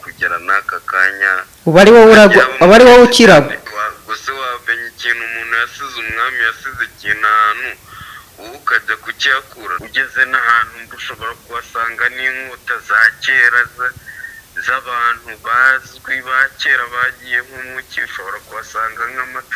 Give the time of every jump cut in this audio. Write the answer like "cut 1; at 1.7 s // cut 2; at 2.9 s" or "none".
cut 1; at 3.7 s // cut 2; at 9.8 s